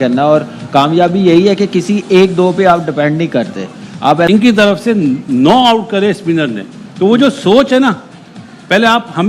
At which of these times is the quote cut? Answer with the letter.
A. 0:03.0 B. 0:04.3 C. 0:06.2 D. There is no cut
B